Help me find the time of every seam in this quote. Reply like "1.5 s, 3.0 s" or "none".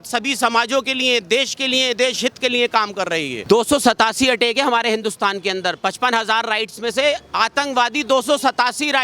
none